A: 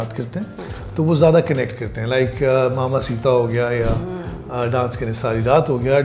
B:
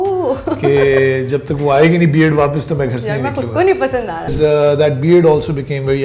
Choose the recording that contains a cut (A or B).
B